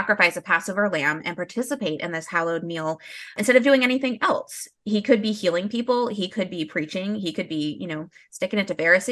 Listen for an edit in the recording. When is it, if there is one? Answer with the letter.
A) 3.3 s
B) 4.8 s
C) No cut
A